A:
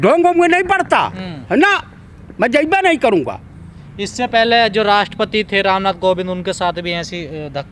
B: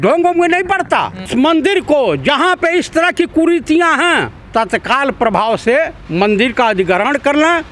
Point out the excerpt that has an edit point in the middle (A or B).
B